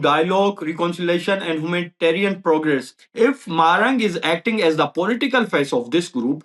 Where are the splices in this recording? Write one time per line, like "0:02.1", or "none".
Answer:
0:03.0

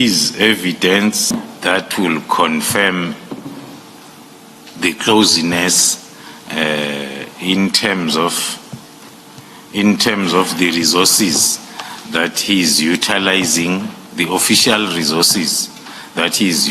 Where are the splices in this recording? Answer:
0:01.5

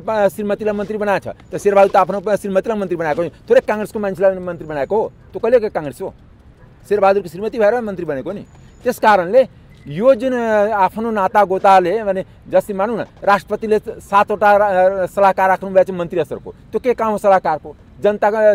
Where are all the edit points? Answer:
none

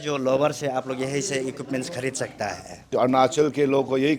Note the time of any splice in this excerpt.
0:02.9

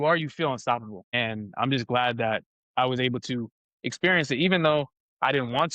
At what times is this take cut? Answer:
0:01.0

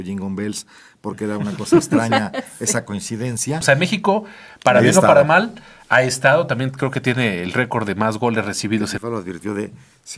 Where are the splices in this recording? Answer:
0:03.6
0:09.0

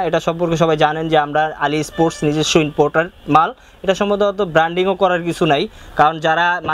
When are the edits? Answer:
none

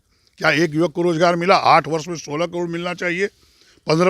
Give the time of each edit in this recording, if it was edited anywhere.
none

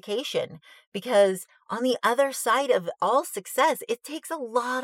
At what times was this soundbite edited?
0:02.9

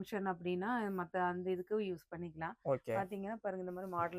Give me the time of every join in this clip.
none

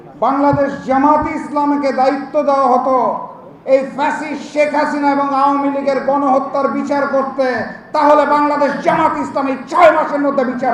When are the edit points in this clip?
none

